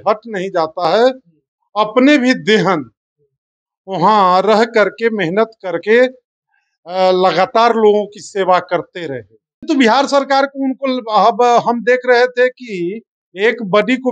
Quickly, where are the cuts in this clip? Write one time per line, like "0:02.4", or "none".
0:09.7